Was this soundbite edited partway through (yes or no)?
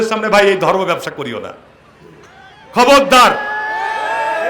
no